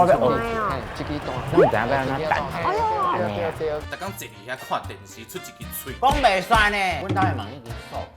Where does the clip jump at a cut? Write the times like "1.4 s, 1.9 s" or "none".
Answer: 3.9 s, 7.0 s